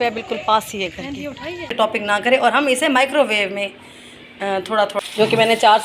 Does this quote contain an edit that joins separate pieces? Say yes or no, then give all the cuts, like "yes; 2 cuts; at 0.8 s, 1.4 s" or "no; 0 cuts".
yes; 2 cuts; at 1.7 s, 4.9 s